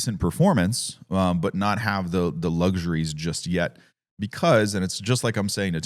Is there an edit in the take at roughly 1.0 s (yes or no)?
no